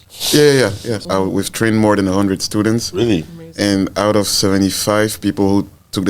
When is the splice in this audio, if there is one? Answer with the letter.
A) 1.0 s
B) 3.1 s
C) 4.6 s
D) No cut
A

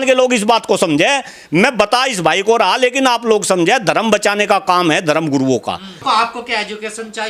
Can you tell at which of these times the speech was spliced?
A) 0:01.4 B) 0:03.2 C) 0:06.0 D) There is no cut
C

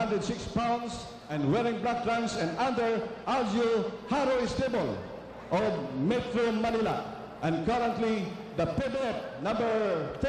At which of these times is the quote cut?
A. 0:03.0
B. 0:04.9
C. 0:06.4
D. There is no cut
D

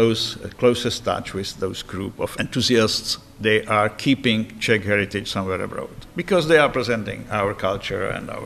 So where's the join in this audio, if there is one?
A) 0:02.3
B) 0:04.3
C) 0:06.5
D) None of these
A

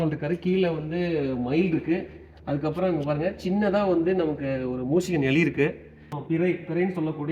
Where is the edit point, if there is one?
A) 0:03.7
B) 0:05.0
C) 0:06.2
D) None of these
C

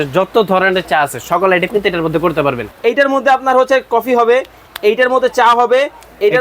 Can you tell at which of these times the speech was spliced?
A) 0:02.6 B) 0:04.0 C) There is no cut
A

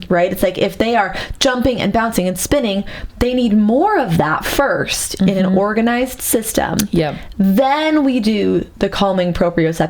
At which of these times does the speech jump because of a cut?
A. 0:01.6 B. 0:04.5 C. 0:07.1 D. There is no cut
D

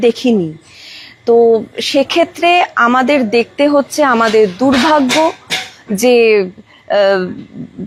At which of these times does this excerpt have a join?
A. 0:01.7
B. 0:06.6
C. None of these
C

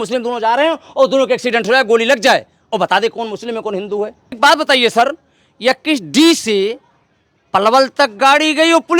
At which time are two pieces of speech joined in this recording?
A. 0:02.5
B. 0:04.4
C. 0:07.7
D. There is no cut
B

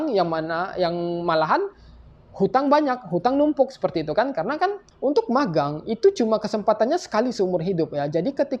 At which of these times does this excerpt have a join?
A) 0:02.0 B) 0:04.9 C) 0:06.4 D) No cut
B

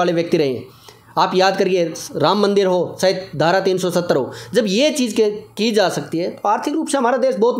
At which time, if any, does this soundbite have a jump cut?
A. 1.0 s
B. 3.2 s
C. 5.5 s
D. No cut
D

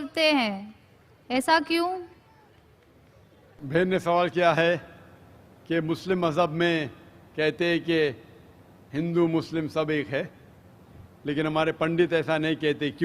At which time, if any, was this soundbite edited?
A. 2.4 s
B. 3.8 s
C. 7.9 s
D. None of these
B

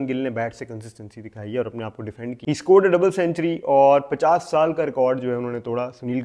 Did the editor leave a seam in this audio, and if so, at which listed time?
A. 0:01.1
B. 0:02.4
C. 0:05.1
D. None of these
B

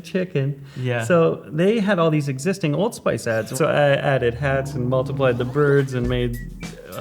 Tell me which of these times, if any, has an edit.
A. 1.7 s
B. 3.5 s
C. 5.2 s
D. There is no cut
B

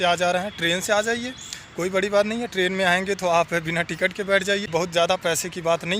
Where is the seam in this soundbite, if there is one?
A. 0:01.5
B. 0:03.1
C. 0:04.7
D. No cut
C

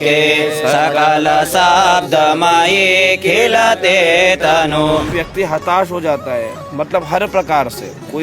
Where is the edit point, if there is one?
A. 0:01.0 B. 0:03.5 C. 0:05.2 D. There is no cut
C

